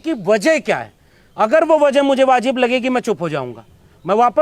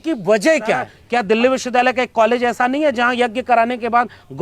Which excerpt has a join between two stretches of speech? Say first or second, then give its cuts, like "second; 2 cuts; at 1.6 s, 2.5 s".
second; 1 cut; at 0.9 s